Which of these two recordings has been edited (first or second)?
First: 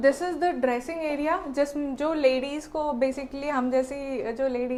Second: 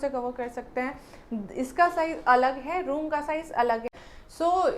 second